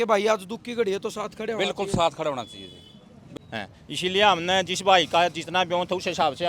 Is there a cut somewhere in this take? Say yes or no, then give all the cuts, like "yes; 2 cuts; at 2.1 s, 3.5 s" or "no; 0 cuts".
yes; 1 cut; at 3.3 s